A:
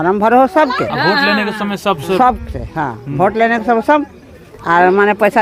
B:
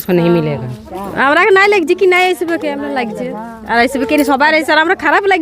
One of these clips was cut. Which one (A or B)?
B